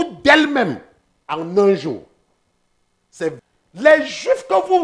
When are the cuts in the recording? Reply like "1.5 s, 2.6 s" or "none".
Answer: 3.4 s